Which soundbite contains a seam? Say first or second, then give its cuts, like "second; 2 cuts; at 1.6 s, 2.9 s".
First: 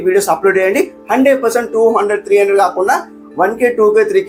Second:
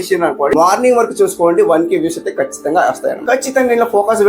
second; 1 cut; at 3.2 s